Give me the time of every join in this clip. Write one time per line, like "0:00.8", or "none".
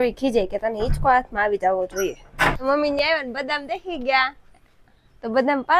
0:02.6

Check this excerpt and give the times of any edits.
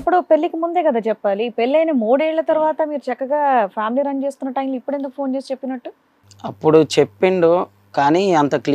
none

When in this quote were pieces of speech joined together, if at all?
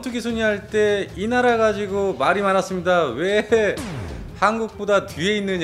none

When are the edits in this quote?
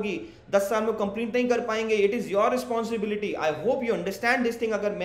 none

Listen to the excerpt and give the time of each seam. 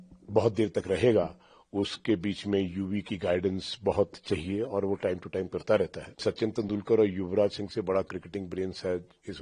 0:06.2

